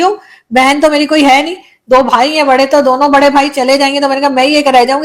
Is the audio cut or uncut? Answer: uncut